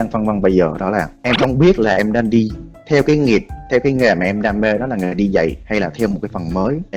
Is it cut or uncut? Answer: uncut